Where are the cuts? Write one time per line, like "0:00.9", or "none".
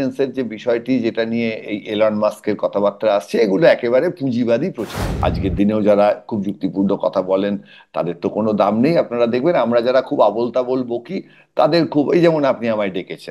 0:05.0

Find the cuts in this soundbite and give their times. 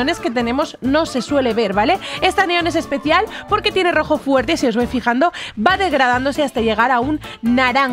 none

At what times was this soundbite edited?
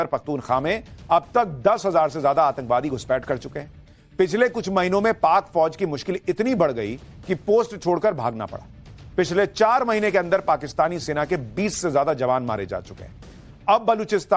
0:08.0

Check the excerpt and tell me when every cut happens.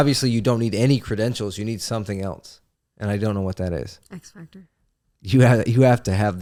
none

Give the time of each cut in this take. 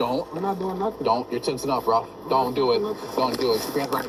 none

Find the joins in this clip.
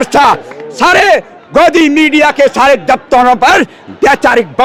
none

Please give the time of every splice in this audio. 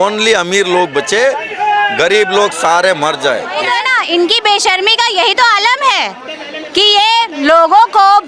0:03.7

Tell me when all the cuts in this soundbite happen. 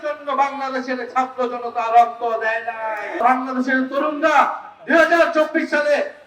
0:03.2

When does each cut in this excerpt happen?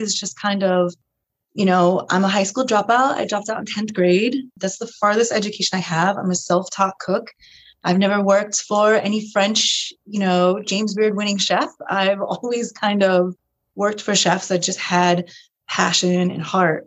none

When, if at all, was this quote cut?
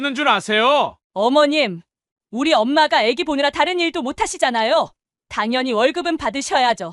0:01.0

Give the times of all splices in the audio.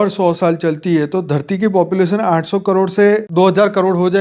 0:03.3

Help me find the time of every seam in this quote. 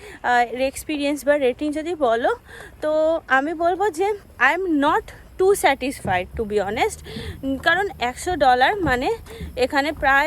0:04.3

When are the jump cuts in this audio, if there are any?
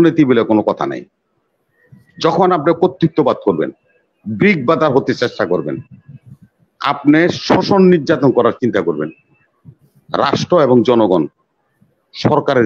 none

